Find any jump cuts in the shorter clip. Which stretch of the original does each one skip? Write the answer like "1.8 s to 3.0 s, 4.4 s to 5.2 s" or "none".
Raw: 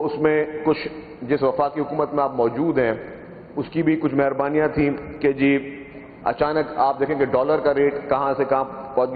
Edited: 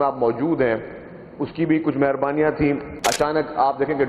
5.1 s to 6.1 s